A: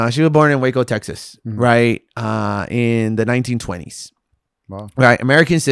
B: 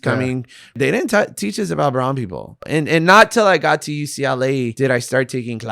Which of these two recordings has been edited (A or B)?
B